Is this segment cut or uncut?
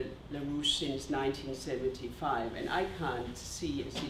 uncut